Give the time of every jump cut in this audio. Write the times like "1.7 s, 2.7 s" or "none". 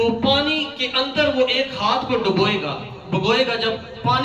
none